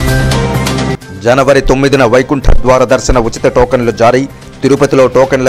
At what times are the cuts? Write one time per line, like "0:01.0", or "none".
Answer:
0:01.0